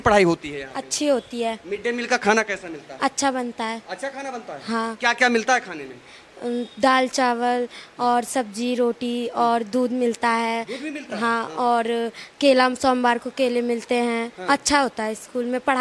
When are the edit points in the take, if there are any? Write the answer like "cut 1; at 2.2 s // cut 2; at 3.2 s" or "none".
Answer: none